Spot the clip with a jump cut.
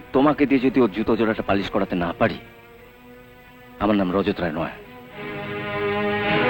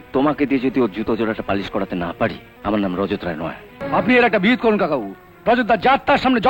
second; 2 cuts; at 2.5 s, 3.7 s

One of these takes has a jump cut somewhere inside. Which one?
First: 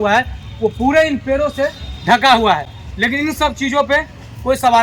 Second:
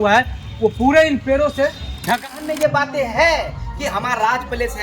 second; 1 cut; at 2.1 s

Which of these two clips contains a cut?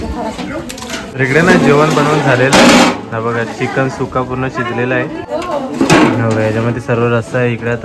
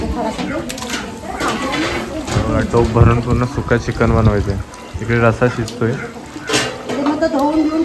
first; 2 cuts; at 1.0 s, 5.3 s

